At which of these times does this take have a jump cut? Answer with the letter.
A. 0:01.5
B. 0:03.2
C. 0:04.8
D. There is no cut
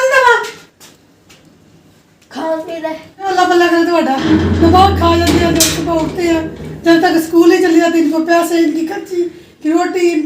B